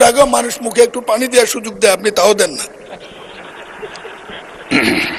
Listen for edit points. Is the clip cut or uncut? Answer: uncut